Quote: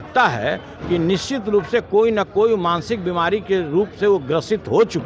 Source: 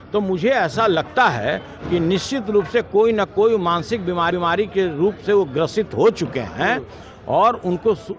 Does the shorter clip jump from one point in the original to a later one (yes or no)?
yes